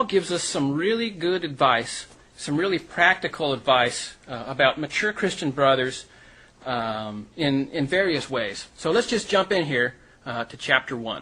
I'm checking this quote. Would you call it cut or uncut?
uncut